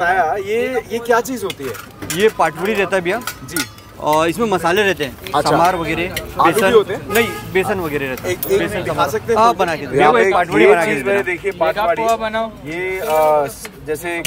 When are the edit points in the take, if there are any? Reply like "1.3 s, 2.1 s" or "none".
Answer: none